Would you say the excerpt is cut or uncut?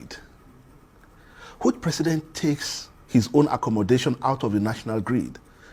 uncut